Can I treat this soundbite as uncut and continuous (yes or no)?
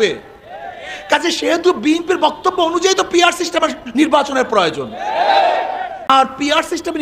no